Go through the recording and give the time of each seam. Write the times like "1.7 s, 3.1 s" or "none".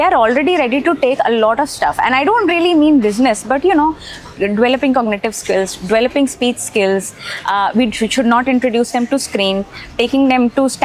none